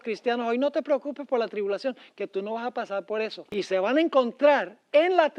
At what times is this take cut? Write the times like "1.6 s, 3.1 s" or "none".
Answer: 3.4 s

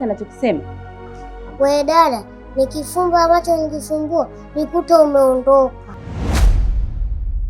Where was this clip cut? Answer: 6.0 s

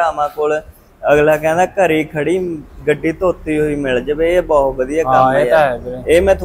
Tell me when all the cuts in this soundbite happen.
none

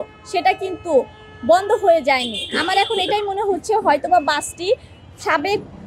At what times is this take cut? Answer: none

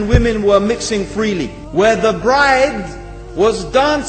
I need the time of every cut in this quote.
1.6 s

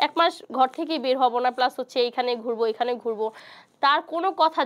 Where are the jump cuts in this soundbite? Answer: none

